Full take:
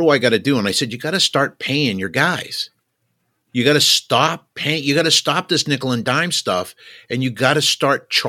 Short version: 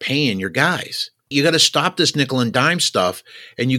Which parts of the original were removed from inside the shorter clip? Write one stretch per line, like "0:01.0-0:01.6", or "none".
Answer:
0:02.9-0:04.8